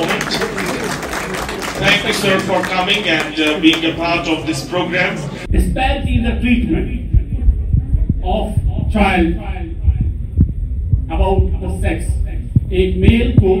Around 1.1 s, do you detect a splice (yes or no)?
no